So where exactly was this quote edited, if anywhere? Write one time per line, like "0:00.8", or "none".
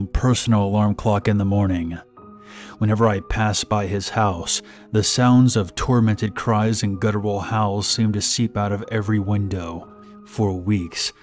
0:09.4